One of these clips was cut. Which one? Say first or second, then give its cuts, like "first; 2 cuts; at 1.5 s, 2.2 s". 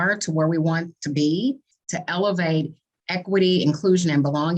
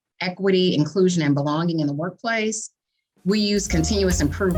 first; 1 cut; at 1.7 s